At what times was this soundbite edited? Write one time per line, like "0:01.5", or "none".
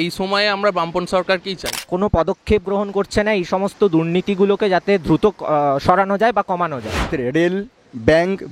0:01.7
0:07.1